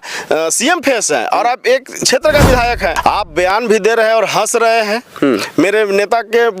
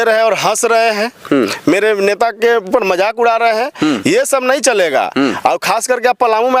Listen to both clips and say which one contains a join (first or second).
first